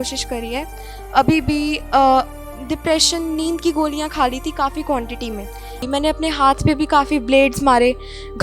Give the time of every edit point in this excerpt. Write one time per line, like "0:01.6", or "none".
0:05.8